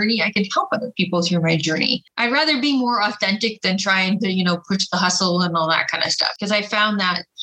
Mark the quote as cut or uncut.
cut